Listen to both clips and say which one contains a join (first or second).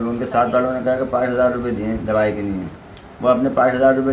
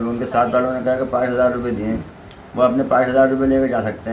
second